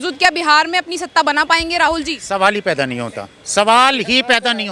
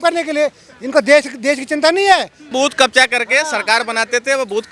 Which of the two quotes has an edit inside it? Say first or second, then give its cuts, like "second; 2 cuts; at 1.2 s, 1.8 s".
second; 1 cut; at 2.5 s